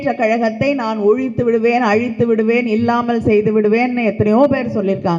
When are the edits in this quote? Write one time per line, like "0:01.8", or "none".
none